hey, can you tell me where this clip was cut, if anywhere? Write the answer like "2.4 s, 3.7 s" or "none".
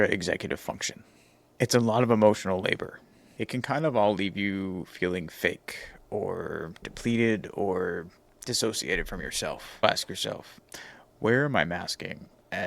3.2 s, 9.8 s